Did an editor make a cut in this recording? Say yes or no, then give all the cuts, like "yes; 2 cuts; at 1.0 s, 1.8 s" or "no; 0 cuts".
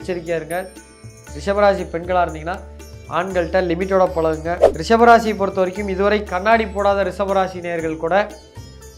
yes; 1 cut; at 4.7 s